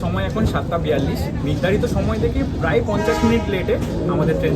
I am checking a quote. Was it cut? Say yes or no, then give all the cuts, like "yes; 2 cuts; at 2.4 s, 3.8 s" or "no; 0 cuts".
no; 0 cuts